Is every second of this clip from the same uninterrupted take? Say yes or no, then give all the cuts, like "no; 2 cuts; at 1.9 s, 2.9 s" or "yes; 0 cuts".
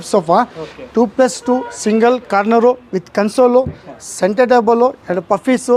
yes; 0 cuts